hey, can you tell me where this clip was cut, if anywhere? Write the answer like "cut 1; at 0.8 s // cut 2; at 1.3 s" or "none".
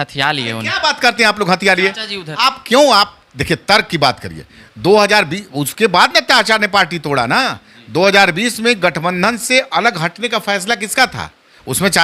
none